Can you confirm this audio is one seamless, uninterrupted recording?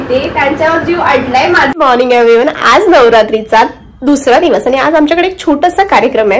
no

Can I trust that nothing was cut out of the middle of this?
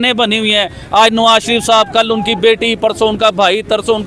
yes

